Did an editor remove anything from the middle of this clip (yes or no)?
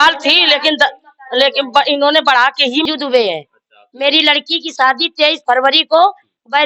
yes